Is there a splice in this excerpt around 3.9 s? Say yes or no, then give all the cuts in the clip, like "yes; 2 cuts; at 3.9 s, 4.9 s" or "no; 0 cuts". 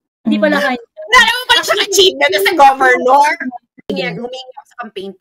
yes; 1 cut; at 3.9 s